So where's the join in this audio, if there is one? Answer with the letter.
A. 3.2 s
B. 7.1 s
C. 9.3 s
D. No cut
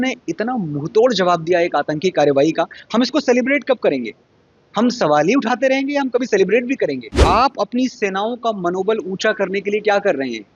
B